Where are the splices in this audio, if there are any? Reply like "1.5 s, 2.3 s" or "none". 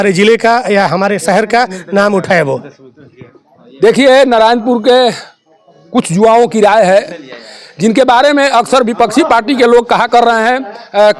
none

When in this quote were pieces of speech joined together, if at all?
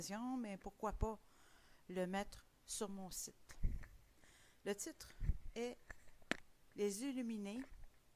4.6 s

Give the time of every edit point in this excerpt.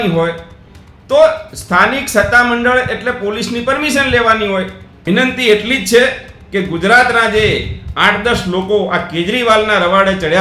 4.9 s

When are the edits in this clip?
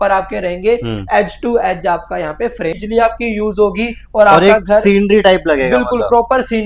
2.8 s

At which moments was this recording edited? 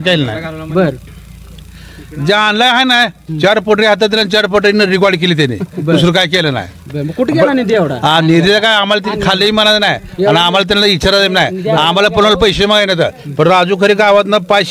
none

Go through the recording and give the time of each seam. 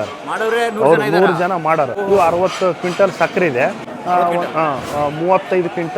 2.0 s, 3.9 s

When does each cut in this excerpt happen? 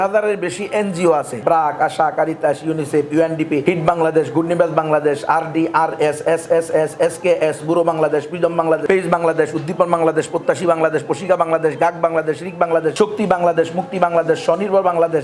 1.3 s, 3.6 s, 8.8 s, 12.9 s

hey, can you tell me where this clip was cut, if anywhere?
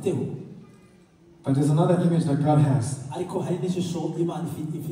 none

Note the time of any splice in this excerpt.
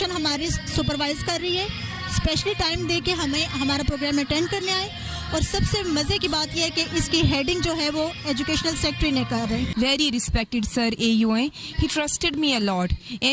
9.7 s

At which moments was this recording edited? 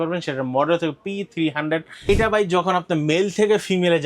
2.1 s

